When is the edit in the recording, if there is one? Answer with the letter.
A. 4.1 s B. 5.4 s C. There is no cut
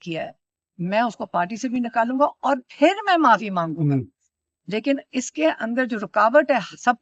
C